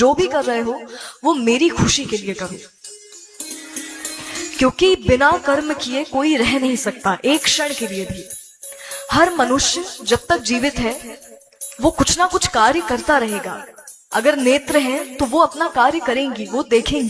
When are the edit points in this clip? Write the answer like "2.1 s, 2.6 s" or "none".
10.2 s